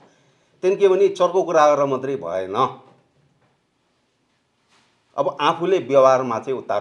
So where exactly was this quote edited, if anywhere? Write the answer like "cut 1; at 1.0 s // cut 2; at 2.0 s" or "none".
none